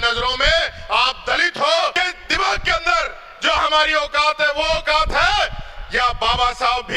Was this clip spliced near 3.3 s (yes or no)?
no